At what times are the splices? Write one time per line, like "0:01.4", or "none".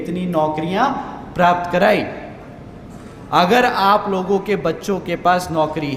none